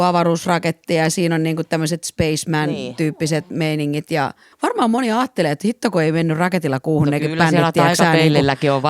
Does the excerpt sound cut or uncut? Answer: cut